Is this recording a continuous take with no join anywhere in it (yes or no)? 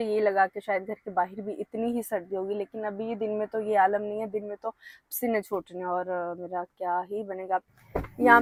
yes